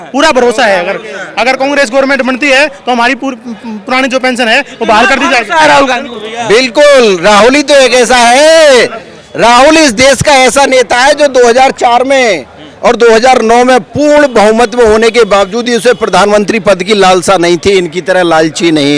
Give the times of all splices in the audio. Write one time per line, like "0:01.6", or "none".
none